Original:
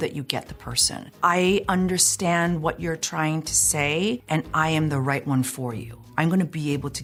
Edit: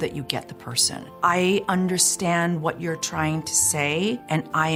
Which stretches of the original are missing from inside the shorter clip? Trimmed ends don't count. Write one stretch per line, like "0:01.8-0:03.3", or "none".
none